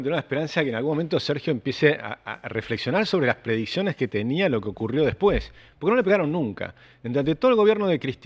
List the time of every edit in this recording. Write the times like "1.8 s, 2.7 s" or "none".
none